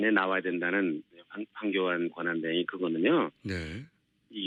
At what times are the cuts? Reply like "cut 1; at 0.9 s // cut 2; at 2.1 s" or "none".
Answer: none